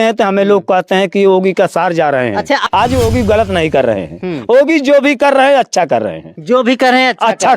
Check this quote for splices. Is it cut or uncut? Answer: cut